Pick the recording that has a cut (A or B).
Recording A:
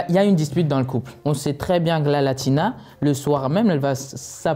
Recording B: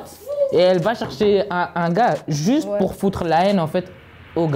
A